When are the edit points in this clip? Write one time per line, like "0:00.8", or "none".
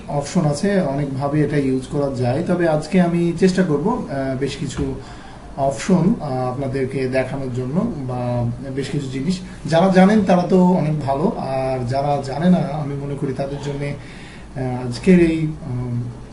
none